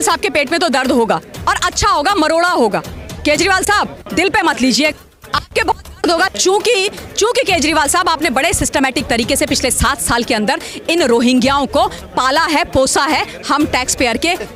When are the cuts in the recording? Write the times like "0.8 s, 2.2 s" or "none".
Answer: none